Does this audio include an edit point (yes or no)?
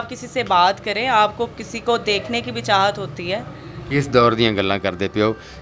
no